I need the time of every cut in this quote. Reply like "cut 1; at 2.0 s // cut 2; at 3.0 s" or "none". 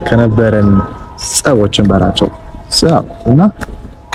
none